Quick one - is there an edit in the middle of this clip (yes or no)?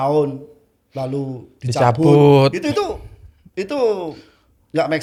no